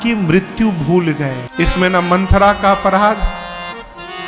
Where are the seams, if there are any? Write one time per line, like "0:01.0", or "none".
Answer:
0:01.4